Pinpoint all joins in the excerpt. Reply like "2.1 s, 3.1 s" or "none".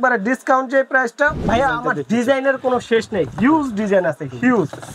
1.4 s